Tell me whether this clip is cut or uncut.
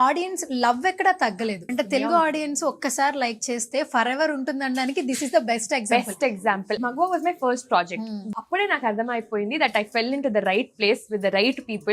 cut